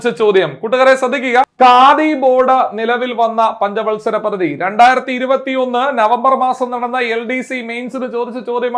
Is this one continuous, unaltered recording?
yes; 0 cuts

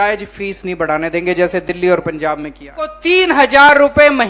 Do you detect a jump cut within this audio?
yes; 1 cut; at 3.0 s

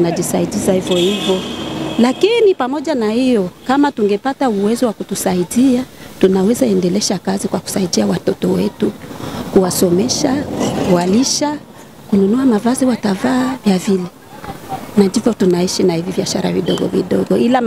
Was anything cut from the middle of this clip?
no; 0 cuts

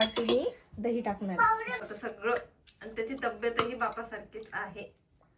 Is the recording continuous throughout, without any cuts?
no; 1 cut; at 1.8 s

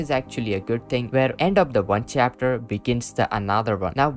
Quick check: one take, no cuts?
no; 1 cut; at 1.1 s

